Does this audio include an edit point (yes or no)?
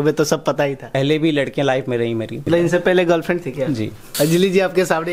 yes